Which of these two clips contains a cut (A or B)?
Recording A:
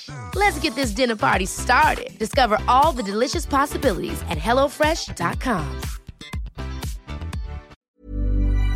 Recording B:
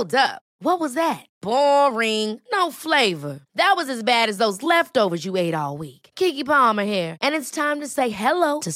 A